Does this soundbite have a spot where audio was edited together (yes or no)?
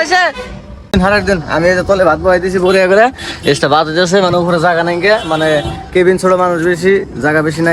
yes